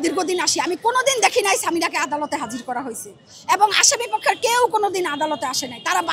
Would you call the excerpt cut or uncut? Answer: uncut